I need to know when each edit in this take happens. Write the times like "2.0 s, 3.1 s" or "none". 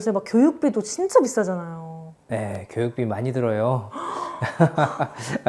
none